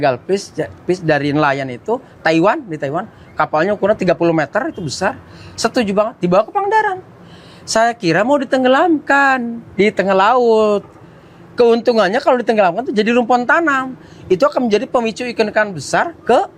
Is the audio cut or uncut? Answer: uncut